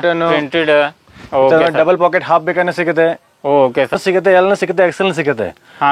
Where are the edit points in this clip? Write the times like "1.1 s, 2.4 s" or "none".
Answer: 3.9 s

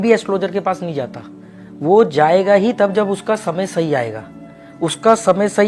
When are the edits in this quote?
none

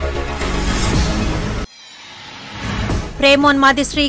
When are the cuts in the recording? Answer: 0.9 s, 2.9 s

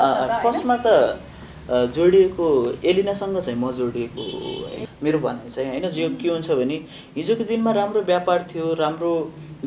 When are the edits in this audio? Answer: 4.8 s

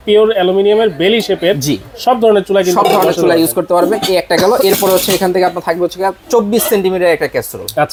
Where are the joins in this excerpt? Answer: none

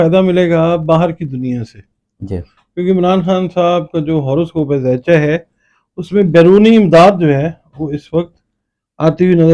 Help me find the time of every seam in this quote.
none

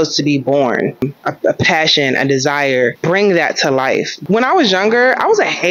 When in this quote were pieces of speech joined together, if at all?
1.0 s, 3.0 s, 4.1 s

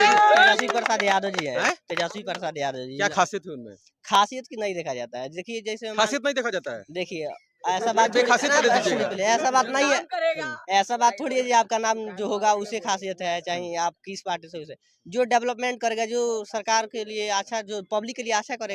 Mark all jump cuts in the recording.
none

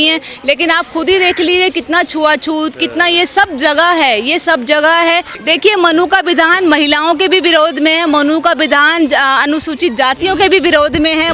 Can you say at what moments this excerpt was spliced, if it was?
5.3 s

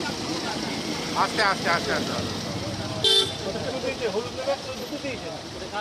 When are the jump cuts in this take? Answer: 1.2 s

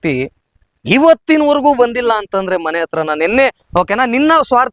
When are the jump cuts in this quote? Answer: 3.6 s

